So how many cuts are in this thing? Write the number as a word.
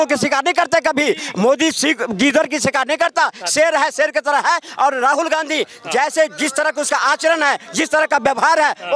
zero